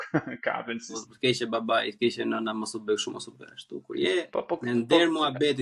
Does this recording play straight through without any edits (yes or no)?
no